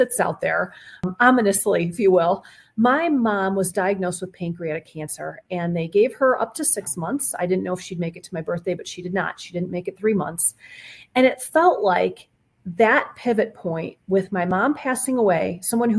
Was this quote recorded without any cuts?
no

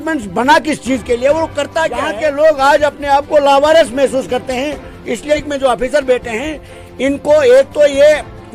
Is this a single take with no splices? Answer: no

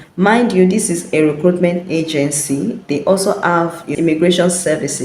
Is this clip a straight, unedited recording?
no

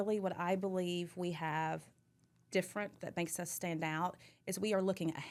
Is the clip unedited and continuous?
yes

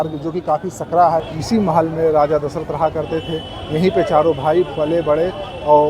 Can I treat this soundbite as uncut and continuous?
no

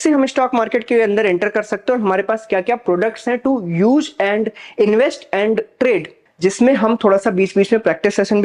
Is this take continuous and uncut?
no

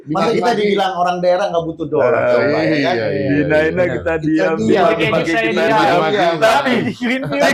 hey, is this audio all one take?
yes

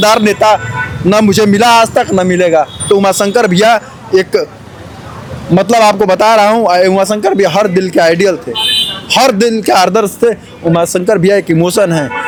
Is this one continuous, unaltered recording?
yes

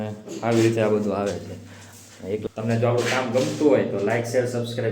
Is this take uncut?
no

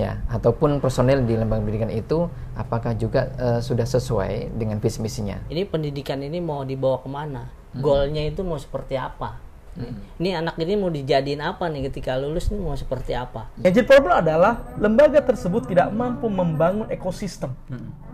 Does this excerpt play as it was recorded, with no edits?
no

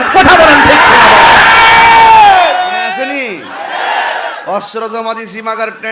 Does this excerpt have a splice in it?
yes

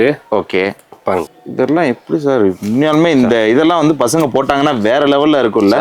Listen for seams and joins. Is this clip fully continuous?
no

